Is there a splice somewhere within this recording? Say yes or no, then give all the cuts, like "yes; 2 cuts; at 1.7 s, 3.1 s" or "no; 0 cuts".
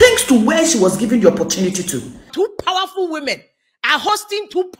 yes; 1 cut; at 2.2 s